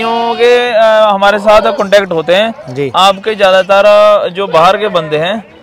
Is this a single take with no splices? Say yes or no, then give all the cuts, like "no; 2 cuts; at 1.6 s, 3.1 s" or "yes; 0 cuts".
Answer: yes; 0 cuts